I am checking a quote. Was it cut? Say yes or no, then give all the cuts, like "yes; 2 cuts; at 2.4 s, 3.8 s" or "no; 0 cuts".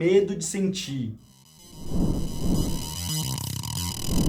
yes; 1 cut; at 1.4 s